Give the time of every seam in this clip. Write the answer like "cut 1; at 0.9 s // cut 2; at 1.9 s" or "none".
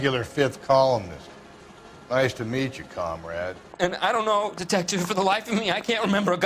cut 1; at 3.6 s